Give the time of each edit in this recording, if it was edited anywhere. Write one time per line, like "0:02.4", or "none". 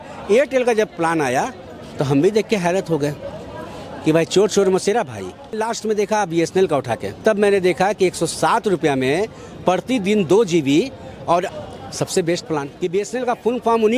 0:05.6
0:07.1
0:11.6
0:12.7